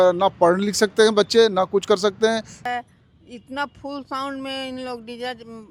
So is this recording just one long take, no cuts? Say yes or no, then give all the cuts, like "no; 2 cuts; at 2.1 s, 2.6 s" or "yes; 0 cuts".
no; 1 cut; at 2.5 s